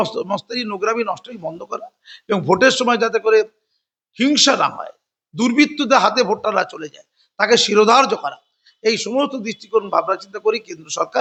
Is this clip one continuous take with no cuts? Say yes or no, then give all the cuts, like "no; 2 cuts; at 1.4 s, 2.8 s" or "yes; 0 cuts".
yes; 0 cuts